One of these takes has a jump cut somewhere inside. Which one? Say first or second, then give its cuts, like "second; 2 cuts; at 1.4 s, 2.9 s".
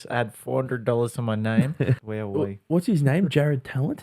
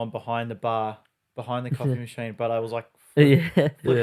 first; 1 cut; at 1.9 s